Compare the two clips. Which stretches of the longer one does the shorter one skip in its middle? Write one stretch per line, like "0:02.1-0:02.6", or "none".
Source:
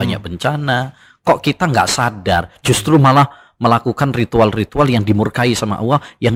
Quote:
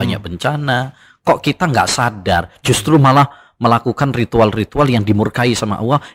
none